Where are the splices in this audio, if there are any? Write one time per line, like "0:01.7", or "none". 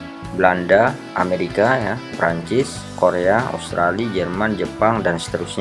0:01.0